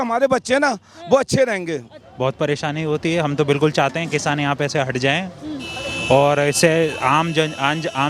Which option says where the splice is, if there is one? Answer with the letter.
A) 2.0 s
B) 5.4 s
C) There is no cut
A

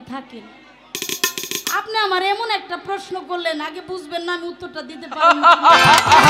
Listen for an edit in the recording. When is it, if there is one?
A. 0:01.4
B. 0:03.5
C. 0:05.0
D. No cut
D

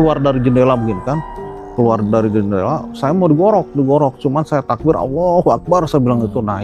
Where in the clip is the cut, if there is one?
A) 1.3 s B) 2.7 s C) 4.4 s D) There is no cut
D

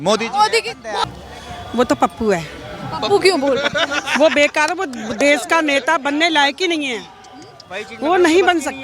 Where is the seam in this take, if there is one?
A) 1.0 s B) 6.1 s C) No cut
A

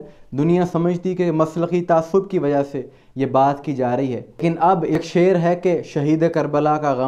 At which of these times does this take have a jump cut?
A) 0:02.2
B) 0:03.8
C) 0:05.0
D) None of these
C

